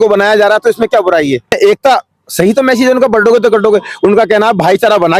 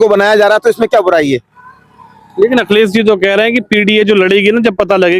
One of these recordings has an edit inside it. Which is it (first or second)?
first